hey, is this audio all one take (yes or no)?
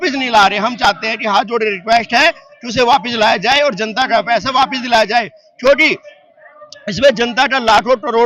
yes